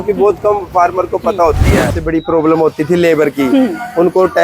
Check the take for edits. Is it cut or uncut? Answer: cut